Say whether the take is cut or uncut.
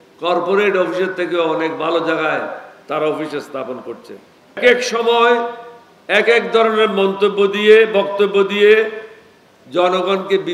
cut